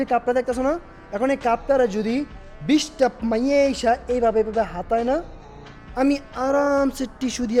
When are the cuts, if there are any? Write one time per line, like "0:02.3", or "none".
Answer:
none